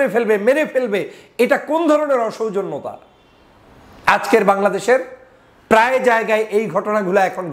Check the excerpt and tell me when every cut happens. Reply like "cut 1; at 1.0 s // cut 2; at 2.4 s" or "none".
none